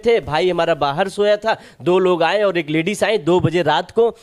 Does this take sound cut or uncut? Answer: uncut